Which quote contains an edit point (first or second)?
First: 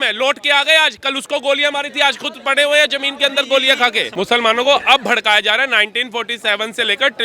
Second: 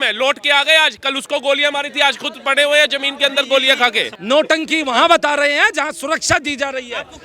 second